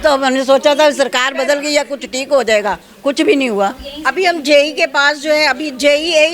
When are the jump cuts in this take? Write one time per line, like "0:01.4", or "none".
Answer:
none